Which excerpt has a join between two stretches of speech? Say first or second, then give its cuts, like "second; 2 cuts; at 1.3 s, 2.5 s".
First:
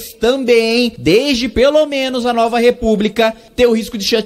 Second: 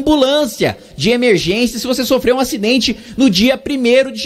first; 2 cuts; at 1.0 s, 3.4 s